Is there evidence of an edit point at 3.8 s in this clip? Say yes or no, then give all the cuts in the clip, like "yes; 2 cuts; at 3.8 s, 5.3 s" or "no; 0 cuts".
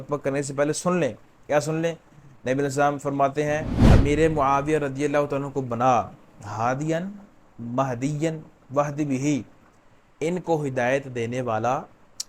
yes; 1 cut; at 3.8 s